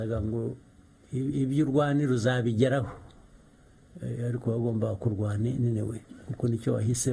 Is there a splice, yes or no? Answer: no